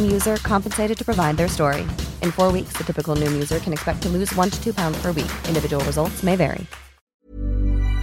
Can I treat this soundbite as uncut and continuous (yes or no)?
no